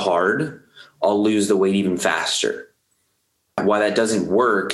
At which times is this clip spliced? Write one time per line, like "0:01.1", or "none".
0:03.6